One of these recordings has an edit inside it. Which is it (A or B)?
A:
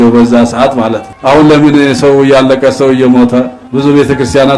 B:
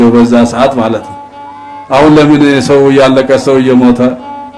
A